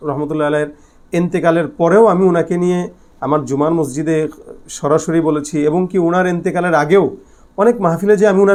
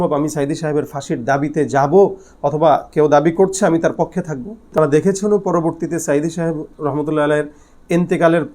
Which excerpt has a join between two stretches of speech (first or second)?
second